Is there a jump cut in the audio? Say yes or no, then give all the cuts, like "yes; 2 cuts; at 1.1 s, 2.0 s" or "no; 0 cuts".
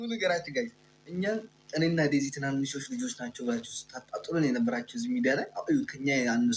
no; 0 cuts